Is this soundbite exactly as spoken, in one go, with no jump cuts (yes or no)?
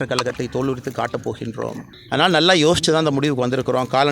no